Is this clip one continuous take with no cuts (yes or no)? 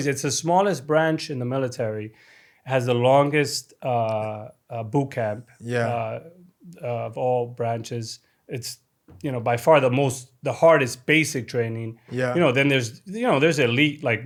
yes